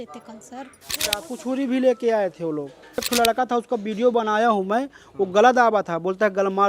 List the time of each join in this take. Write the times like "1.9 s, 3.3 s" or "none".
0.9 s, 3.1 s